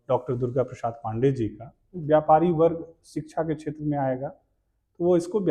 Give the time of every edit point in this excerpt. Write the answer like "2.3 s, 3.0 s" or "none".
2.0 s